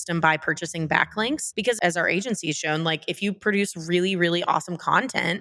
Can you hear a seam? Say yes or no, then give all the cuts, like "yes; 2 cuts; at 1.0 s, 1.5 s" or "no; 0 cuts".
yes; 1 cut; at 1.7 s